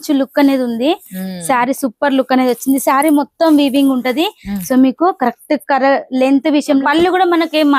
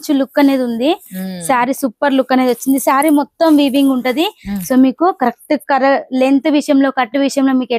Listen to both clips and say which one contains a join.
first; 1 cut; at 6.8 s

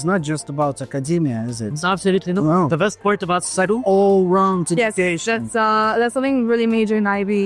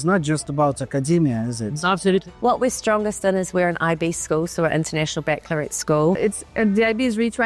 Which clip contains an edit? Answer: second; 2 cuts; at 2.2 s, 6.2 s

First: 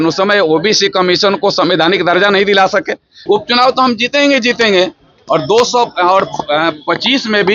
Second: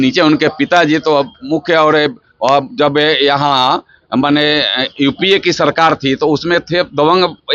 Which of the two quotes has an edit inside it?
first; 1 cut; at 3.2 s

